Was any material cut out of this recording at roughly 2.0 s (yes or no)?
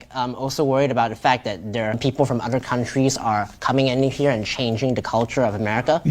yes